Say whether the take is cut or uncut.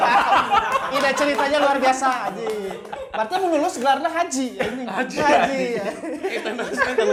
uncut